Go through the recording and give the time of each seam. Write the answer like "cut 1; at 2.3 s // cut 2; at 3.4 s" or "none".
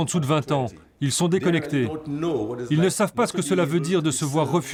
none